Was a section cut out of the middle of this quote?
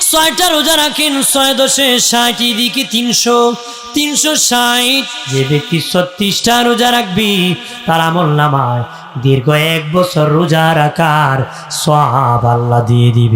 yes; 1 cut; at 5.2 s

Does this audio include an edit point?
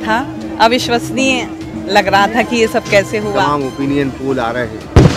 yes; 1 cut; at 3.4 s

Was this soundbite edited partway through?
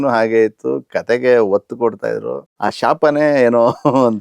yes; 1 cut; at 2.4 s

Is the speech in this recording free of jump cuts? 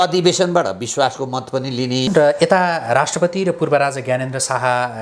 no; 1 cut; at 2.1 s

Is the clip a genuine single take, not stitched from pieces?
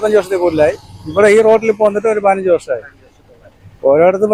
yes; 0 cuts

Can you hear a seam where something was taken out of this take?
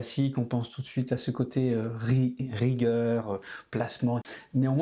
no; 0 cuts

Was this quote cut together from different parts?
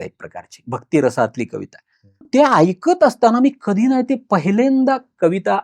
yes; 1 cut; at 2.3 s

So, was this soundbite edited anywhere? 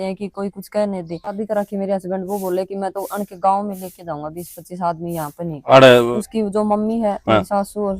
yes; 2 cuts; at 1.4 s, 6.1 s

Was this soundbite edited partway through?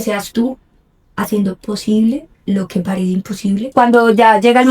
yes; 1 cut; at 3.7 s

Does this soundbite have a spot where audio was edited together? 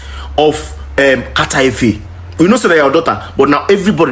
no; 0 cuts

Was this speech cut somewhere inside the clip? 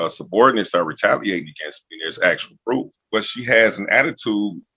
yes; 1 cut; at 3.0 s

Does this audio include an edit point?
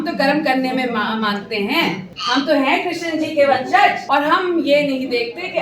yes; 2 cuts; at 2.1 s, 4.0 s

